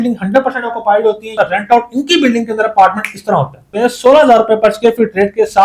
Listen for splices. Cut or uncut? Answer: cut